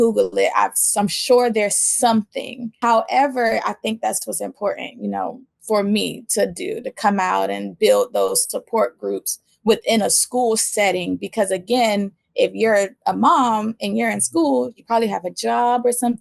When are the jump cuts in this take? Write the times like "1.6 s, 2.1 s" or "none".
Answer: 2.8 s

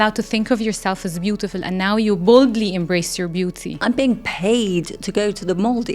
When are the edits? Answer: 3.8 s

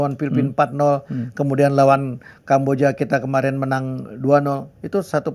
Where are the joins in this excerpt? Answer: none

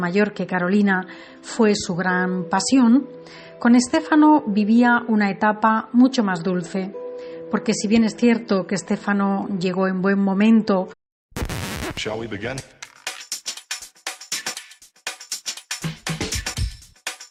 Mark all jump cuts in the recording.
none

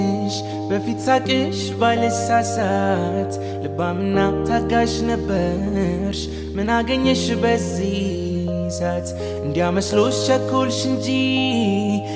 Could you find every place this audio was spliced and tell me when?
none

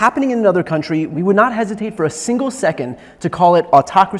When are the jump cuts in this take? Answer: 1.1 s

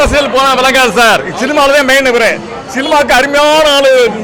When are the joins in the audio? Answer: none

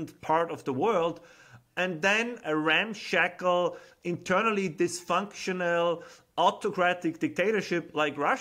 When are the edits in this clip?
2.4 s

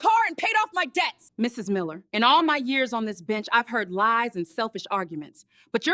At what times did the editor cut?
1.2 s

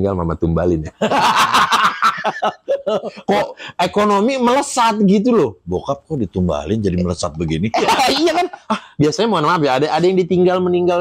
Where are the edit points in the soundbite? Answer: none

